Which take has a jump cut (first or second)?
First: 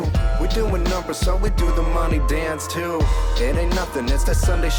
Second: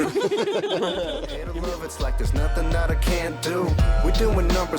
second